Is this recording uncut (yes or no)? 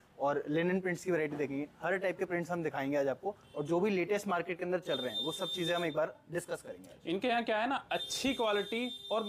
yes